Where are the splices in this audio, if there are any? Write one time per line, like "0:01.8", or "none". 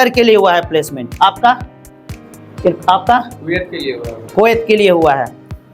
none